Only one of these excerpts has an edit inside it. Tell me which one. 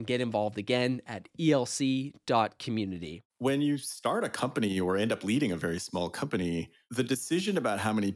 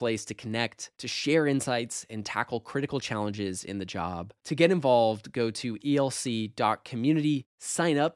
first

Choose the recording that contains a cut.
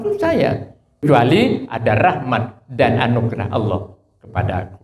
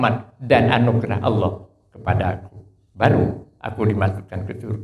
first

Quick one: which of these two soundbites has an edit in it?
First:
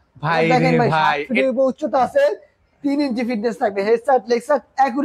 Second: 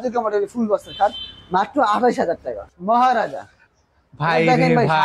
second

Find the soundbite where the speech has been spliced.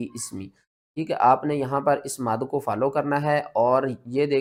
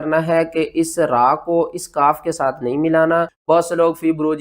second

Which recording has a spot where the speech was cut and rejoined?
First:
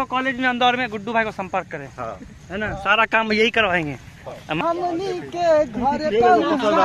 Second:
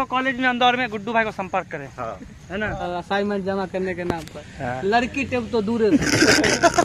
second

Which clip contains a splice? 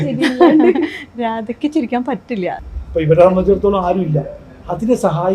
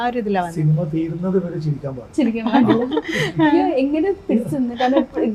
first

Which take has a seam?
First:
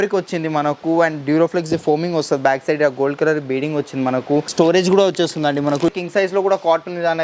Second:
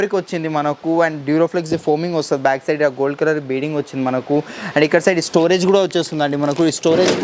first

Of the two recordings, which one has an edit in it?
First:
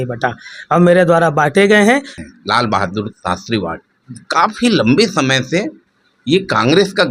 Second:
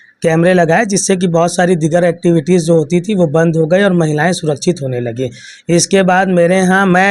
first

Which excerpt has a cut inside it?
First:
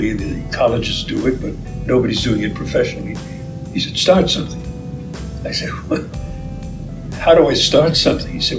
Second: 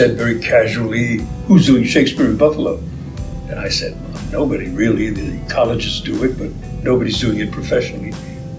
second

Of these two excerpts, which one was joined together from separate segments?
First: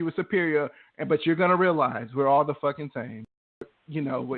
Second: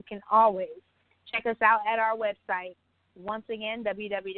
first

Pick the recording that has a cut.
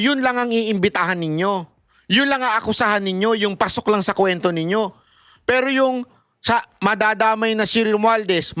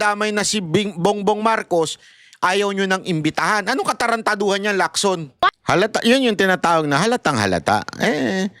second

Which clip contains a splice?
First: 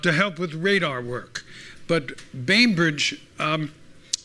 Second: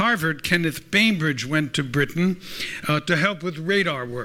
second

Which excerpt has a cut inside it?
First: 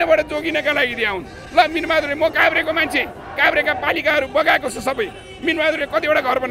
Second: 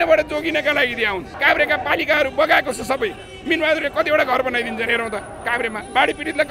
second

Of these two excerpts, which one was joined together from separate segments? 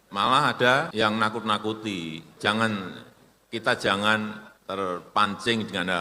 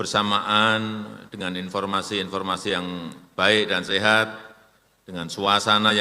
first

